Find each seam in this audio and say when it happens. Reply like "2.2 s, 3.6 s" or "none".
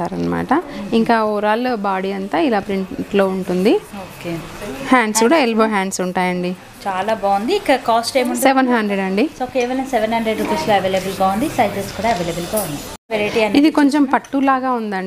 none